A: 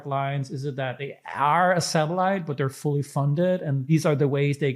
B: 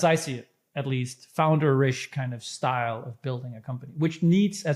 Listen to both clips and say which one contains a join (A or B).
A